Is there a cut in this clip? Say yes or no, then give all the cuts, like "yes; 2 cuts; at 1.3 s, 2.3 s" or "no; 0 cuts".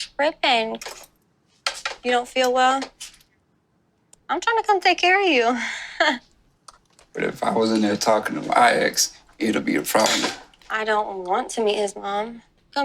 no; 0 cuts